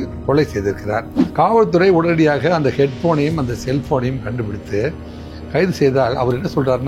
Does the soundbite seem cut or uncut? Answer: cut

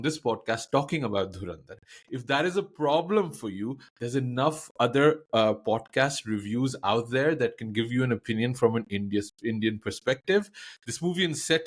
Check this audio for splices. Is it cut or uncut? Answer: uncut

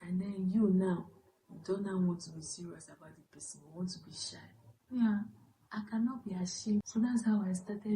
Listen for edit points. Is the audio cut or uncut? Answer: cut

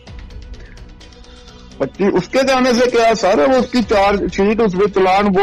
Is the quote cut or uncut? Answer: uncut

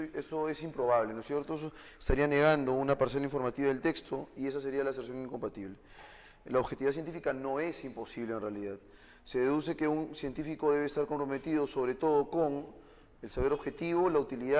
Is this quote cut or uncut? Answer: cut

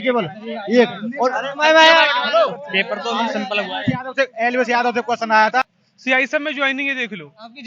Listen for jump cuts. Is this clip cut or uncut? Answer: cut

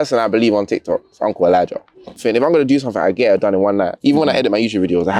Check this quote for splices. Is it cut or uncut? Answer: cut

